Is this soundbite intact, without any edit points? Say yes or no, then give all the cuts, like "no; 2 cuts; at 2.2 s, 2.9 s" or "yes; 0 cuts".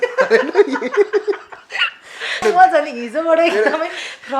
no; 1 cut; at 2.4 s